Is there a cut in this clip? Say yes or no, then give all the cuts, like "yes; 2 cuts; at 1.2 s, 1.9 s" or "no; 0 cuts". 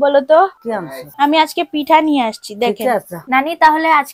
yes; 1 cut; at 3.1 s